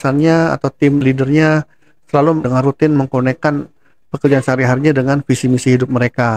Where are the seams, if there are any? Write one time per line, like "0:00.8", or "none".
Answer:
0:01.0
0:02.5